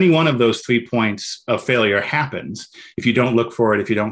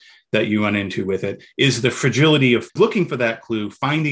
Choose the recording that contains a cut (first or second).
second